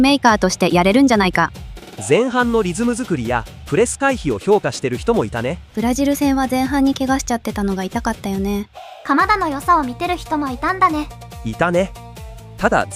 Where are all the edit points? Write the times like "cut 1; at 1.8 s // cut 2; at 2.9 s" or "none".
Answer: none